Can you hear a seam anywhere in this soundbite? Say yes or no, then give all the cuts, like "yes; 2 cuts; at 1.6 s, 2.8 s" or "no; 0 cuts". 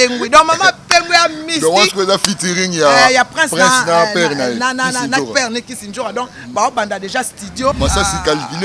yes; 1 cut; at 7.8 s